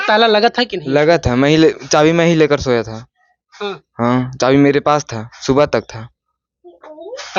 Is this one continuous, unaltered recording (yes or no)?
yes